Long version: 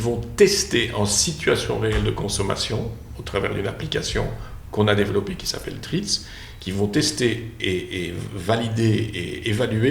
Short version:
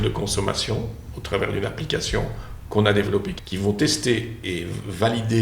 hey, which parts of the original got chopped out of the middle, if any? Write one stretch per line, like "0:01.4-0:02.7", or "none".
0:05.4-0:06.5
0:07.5-0:07.9